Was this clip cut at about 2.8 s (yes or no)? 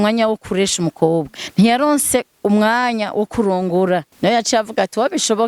no